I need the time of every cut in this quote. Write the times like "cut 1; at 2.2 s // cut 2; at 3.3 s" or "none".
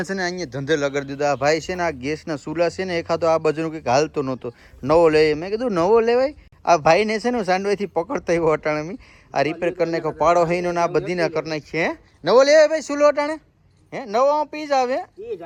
none